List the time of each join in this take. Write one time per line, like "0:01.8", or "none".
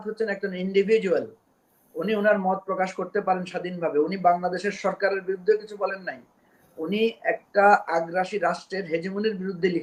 none